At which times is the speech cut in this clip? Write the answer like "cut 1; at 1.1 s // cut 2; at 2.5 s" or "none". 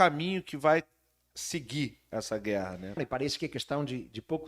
cut 1; at 3.0 s